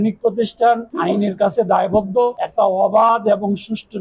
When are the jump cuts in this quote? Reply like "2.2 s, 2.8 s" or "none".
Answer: 2.4 s